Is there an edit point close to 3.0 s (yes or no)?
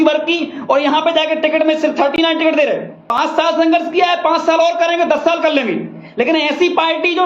yes